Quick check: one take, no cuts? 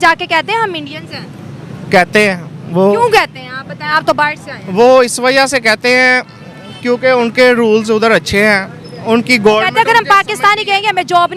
yes; 0 cuts

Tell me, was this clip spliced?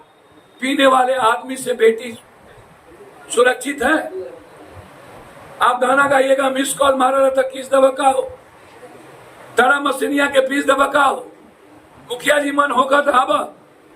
no; 0 cuts

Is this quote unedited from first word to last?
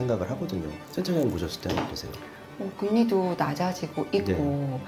yes; 0 cuts

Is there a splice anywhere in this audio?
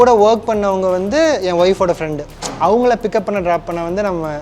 no; 0 cuts

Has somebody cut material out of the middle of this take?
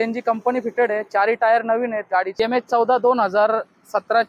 yes; 1 cut; at 2.3 s

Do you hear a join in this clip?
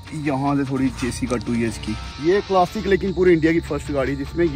yes; 1 cut; at 2.1 s

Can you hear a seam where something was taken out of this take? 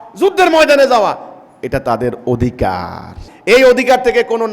yes; 1 cut; at 3.3 s

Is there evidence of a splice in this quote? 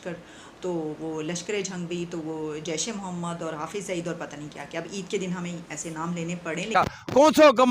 yes; 1 cut; at 6.7 s

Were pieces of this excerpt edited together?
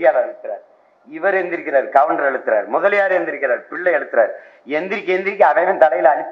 no; 0 cuts

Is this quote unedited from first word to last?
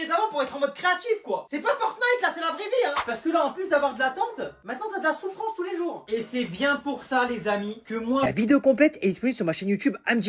no; 1 cut; at 8.2 s

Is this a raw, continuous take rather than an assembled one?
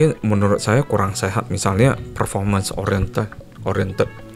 yes; 0 cuts

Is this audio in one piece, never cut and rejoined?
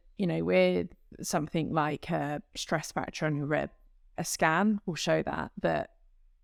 yes; 0 cuts

